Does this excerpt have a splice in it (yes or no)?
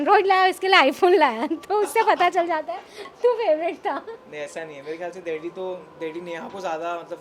no